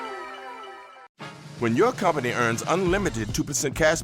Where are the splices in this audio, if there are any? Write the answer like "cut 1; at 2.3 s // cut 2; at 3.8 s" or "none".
cut 1; at 1.0 s